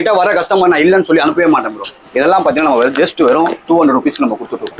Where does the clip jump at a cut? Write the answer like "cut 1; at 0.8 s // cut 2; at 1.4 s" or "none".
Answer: cut 1; at 1.9 s